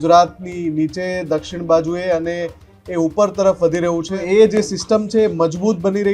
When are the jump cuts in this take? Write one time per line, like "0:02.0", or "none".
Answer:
0:04.1